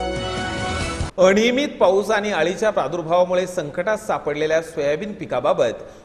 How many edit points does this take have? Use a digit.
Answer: 0